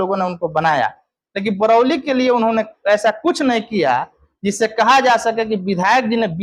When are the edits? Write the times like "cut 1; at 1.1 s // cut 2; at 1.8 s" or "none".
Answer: none